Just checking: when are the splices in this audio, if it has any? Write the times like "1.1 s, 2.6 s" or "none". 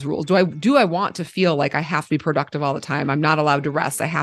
none